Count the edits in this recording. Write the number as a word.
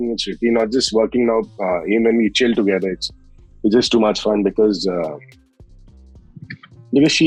zero